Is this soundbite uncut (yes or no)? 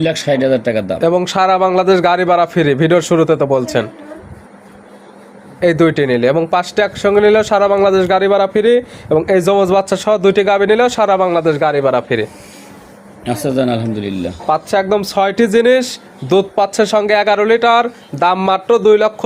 yes